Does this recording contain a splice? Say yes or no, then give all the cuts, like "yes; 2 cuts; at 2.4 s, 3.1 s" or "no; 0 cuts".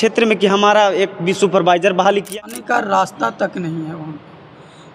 yes; 1 cut; at 2.4 s